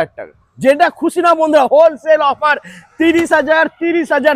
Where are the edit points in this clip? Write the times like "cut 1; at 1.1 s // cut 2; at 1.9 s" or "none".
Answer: none